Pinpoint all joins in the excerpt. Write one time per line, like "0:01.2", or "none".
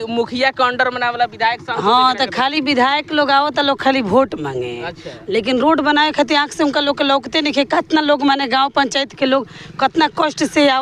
none